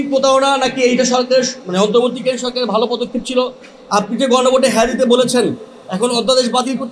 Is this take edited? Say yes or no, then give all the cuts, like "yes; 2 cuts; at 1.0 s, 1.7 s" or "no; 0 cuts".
no; 0 cuts